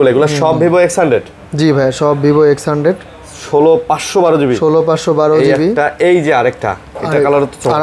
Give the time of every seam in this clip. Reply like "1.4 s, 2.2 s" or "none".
none